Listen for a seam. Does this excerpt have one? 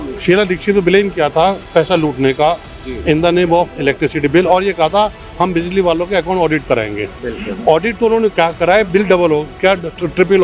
no; 0 cuts

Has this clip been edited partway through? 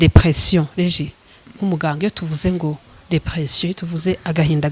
no; 0 cuts

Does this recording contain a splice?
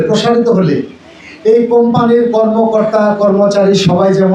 no; 0 cuts

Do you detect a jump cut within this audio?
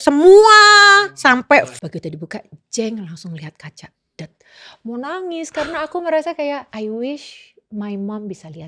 yes; 2 cuts; at 1.6 s, 6.7 s

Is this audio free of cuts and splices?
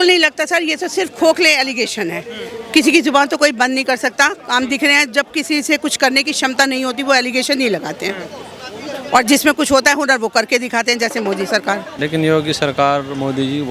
no; 1 cut; at 12.0 s

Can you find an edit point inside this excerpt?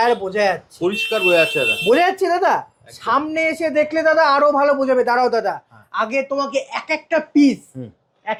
no; 0 cuts

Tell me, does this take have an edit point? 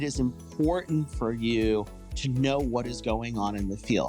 yes; 1 cut; at 2.1 s

